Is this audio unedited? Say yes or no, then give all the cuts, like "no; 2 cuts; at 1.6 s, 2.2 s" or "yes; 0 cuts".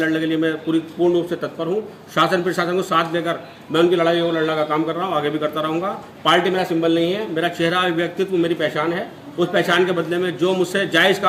yes; 0 cuts